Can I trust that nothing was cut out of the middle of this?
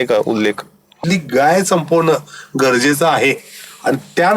no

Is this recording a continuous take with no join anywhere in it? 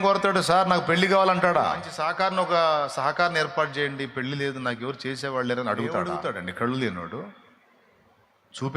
no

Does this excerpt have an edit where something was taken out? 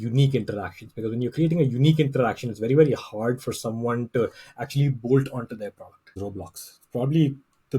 yes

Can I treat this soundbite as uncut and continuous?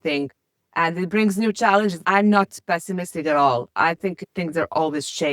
no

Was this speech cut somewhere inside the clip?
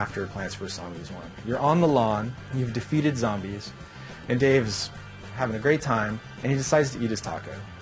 yes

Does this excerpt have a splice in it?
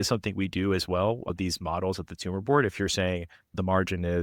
yes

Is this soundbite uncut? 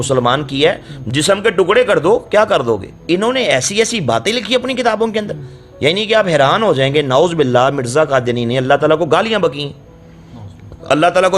no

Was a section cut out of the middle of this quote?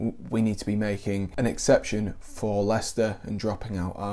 yes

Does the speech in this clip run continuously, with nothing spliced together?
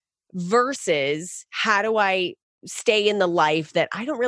no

